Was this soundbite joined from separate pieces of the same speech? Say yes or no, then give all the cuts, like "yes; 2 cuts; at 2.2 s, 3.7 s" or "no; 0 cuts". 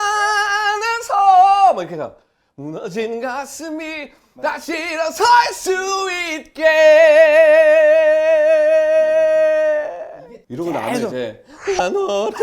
yes; 1 cut; at 10.1 s